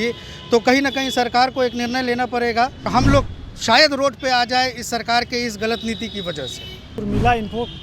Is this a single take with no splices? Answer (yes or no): no